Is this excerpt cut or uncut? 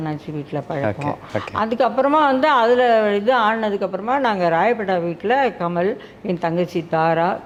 uncut